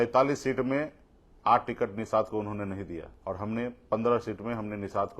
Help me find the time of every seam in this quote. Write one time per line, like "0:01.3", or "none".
0:03.1